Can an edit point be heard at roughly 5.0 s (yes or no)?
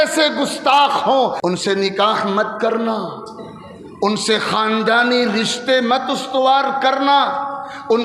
no